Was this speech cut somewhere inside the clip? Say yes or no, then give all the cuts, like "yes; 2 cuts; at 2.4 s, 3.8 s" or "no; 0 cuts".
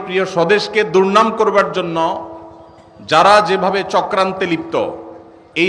no; 0 cuts